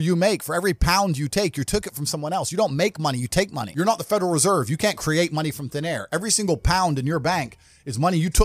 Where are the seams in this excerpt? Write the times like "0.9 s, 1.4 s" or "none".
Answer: 3.6 s